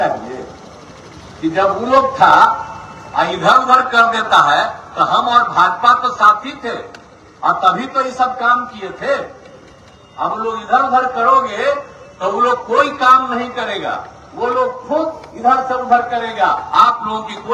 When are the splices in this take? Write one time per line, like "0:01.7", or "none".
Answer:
none

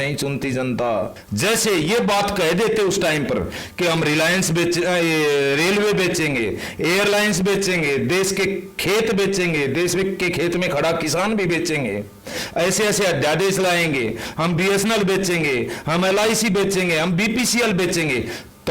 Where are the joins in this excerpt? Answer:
0:01.2

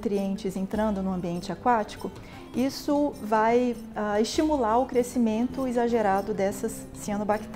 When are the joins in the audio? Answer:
none

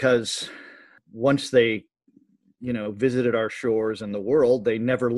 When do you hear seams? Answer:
0:01.0

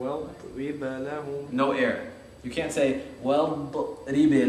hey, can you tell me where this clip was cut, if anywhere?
0:01.1

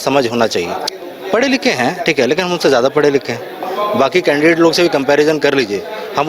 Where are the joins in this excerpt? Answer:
0:00.9
0:03.7

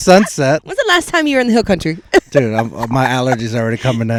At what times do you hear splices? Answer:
none

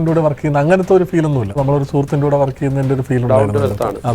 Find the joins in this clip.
0:01.6

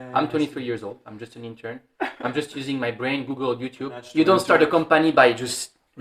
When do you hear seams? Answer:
0:04.0

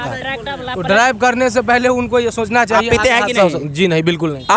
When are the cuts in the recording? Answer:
none

